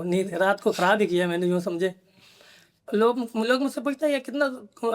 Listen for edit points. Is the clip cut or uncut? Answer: cut